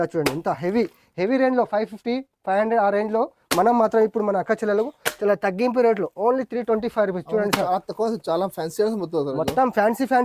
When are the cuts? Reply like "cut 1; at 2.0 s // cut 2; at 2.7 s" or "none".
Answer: none